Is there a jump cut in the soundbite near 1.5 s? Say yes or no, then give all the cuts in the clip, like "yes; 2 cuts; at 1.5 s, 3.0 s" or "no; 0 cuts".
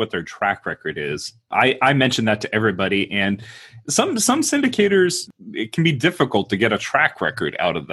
yes; 2 cuts; at 1.5 s, 5.3 s